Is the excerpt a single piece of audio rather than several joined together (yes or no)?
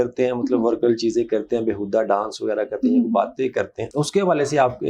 yes